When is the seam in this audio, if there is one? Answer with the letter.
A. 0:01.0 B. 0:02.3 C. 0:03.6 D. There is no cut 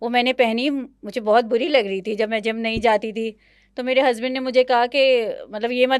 D